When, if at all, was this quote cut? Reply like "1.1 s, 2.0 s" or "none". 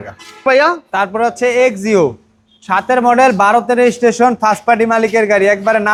none